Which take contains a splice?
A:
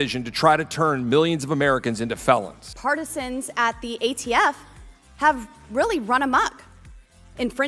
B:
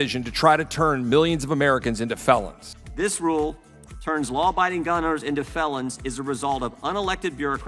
A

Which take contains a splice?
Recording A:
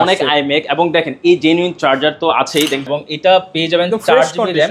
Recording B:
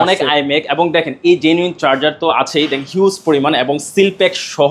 A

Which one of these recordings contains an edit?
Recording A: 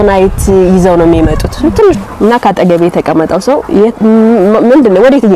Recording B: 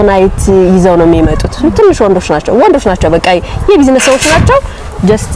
A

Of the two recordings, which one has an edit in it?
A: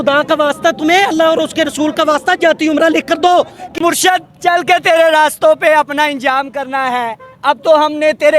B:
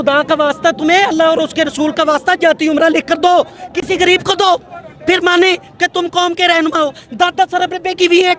A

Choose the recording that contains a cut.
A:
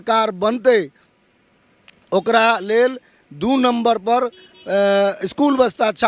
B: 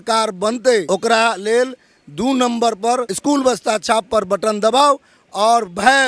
B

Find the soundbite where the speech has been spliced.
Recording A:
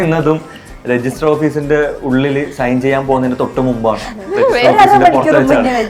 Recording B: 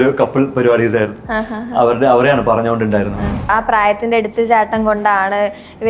B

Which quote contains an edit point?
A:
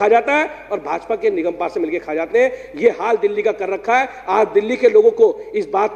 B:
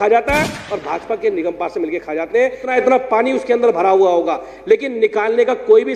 B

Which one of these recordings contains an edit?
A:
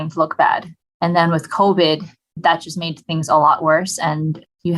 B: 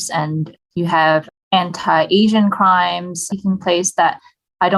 A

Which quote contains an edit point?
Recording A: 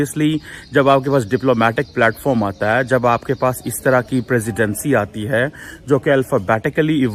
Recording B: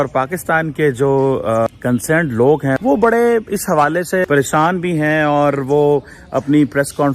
B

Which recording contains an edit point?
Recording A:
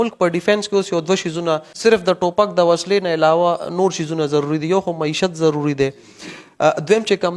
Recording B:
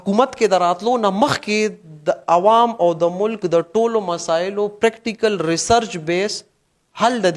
A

